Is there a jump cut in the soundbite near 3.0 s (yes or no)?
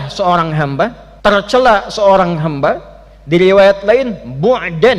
no